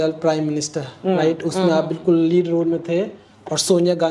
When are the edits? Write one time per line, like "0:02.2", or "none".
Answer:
none